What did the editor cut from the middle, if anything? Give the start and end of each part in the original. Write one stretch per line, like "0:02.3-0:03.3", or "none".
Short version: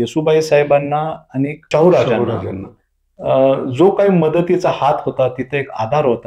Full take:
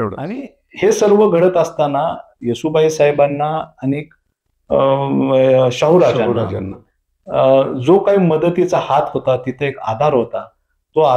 0:04.1-0:05.7